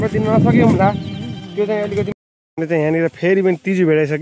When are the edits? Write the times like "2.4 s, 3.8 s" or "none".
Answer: 2.1 s